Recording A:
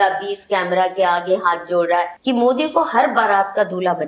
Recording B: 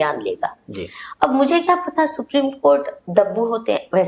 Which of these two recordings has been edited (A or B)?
A